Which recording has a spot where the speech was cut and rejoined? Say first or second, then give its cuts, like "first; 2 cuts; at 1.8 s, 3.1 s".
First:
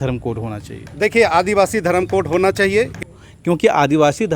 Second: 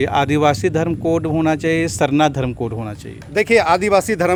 first; 1 cut; at 2.9 s